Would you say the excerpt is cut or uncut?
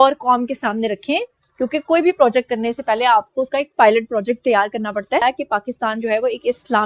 cut